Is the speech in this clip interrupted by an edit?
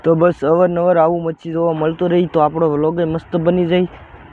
no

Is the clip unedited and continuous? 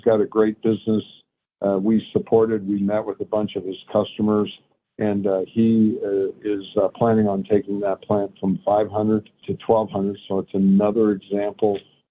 no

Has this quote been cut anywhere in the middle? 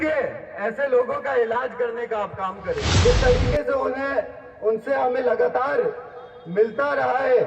yes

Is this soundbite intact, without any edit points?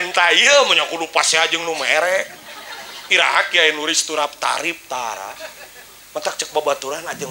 yes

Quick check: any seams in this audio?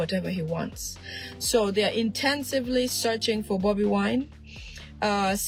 no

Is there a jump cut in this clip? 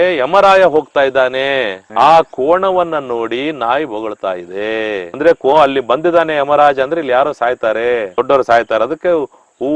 no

